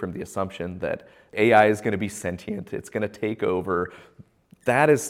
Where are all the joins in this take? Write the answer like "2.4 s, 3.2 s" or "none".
1.3 s